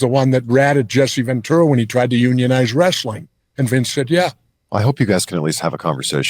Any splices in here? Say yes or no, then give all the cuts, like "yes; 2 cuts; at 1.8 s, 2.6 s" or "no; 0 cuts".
yes; 1 cut; at 4.5 s